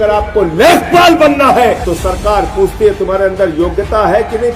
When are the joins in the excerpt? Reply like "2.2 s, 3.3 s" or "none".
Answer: 1.9 s